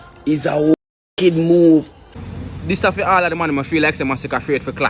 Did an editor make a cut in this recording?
yes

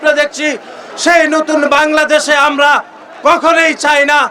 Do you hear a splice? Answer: no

